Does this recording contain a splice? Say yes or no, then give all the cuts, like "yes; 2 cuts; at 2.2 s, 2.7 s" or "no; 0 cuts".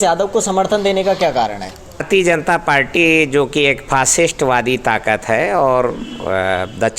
yes; 1 cut; at 2.0 s